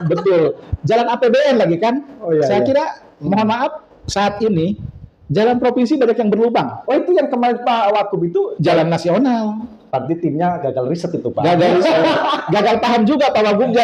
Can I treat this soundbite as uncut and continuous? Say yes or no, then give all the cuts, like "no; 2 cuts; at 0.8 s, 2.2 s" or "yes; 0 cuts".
yes; 0 cuts